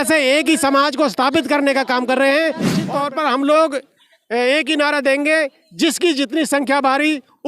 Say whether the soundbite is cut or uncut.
cut